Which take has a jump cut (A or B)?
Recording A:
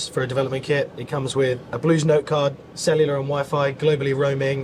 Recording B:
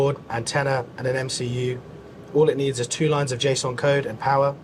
A